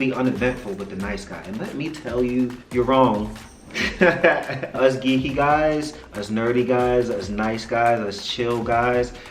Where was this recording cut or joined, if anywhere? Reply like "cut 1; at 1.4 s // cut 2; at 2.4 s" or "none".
cut 1; at 2.6 s // cut 2; at 4.8 s